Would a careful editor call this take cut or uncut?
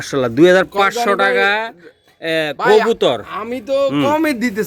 uncut